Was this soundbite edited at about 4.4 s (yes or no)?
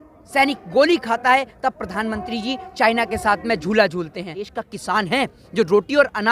yes